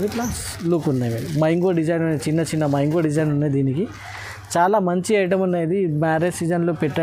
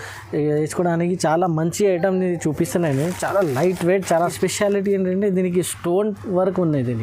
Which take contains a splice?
second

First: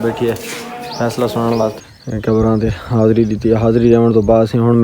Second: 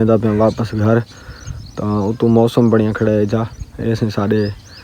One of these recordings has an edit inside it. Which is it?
first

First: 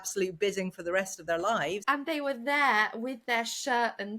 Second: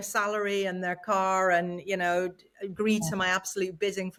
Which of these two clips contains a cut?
first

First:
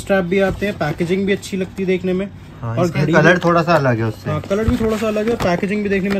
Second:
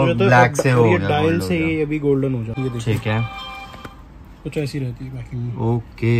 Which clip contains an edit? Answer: second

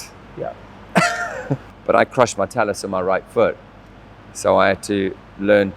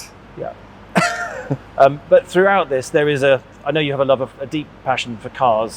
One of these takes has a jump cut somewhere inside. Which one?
first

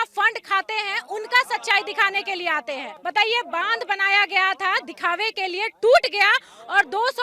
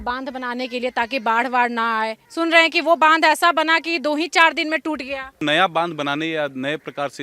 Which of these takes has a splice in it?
second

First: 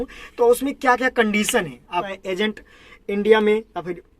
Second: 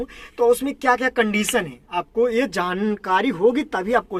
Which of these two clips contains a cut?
first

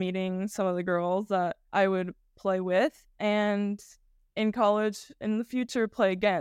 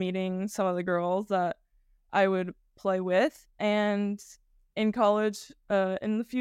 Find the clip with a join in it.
first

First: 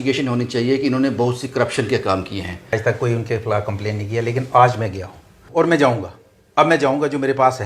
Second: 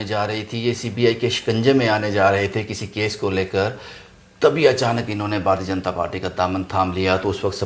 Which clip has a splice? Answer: first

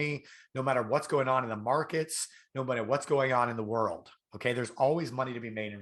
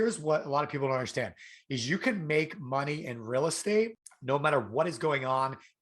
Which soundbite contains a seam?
second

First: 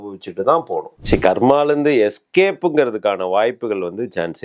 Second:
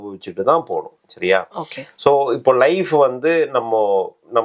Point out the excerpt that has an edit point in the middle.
first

